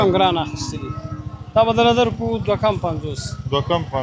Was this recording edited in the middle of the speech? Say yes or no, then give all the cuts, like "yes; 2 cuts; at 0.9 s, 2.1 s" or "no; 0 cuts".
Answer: no; 0 cuts